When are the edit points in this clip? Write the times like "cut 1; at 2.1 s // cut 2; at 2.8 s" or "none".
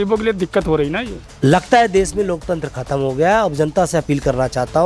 cut 1; at 1.2 s